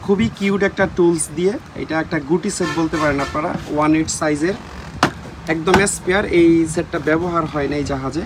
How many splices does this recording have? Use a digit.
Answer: 0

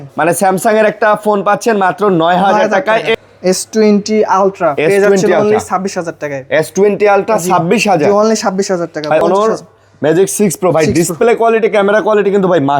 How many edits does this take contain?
2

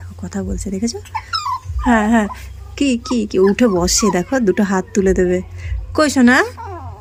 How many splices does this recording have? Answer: 0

